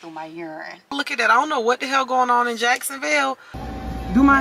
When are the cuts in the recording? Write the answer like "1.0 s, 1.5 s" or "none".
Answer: 0.9 s, 3.6 s